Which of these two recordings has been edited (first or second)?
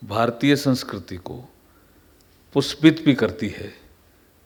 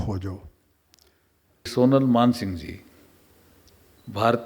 second